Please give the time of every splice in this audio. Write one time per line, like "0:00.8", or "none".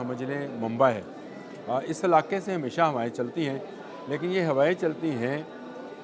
none